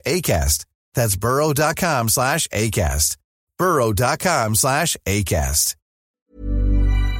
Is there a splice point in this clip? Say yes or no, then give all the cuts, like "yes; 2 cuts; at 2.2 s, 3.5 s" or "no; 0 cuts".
yes; 1 cut; at 6.2 s